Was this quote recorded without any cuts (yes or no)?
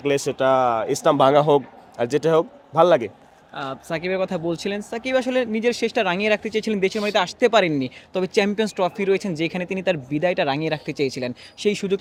yes